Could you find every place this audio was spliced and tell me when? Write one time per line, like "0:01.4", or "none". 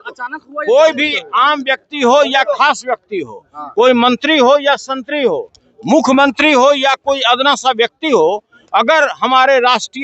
none